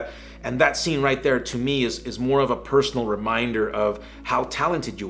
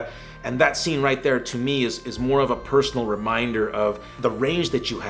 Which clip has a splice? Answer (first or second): second